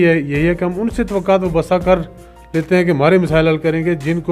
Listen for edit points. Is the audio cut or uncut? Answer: uncut